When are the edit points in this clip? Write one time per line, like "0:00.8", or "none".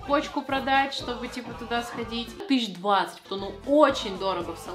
0:02.4
0:03.2